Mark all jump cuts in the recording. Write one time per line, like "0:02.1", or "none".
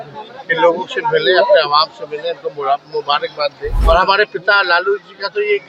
0:03.7